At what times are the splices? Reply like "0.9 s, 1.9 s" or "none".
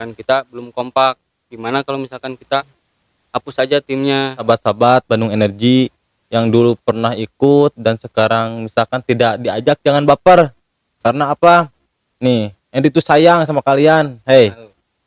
4.4 s